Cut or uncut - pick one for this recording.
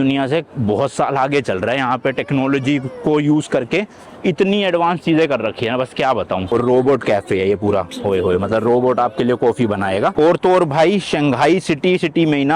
cut